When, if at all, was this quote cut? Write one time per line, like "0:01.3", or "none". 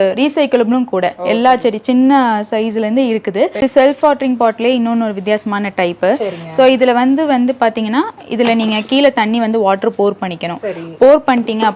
0:03.6